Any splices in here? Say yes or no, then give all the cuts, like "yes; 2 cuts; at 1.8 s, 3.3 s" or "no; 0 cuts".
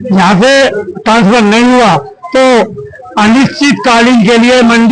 no; 0 cuts